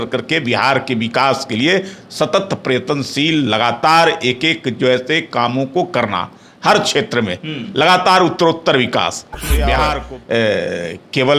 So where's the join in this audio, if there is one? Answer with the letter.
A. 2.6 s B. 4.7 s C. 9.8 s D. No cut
C